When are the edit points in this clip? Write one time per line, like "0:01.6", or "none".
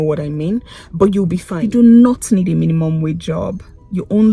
0:01.5